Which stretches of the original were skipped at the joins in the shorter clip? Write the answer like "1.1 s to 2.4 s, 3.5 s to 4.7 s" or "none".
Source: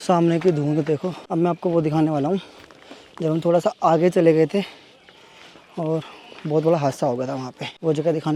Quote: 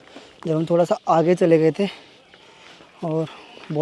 none